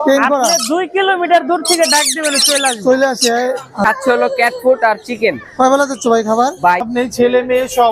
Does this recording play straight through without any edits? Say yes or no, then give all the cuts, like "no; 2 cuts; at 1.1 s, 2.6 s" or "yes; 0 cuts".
no; 2 cuts; at 3.8 s, 6.9 s